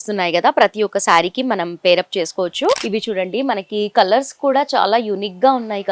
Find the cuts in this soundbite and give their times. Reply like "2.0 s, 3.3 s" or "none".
2.8 s